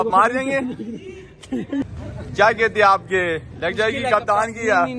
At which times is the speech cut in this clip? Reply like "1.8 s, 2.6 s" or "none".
1.9 s